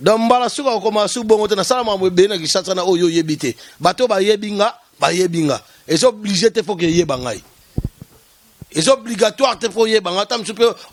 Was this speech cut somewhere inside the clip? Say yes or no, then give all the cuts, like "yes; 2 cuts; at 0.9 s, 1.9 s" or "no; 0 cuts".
no; 0 cuts